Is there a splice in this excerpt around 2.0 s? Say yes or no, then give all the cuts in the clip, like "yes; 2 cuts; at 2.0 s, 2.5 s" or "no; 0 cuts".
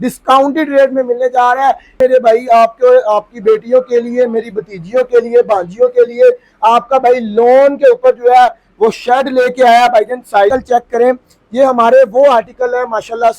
yes; 2 cuts; at 2.0 s, 10.5 s